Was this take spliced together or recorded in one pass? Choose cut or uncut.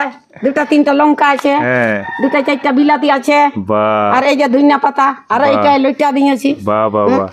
uncut